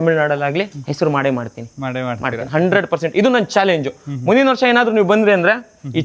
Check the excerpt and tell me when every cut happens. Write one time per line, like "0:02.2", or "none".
none